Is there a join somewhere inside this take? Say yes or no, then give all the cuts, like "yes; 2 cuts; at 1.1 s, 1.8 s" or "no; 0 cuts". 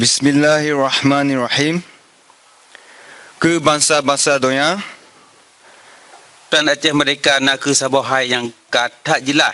yes; 1 cut; at 6.5 s